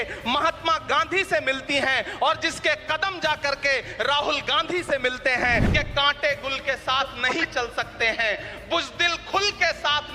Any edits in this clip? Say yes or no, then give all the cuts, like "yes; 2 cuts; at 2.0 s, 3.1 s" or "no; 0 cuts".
yes; 1 cut; at 5.7 s